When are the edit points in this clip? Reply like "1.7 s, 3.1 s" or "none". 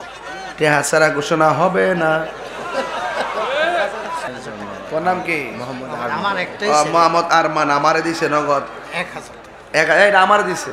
4.3 s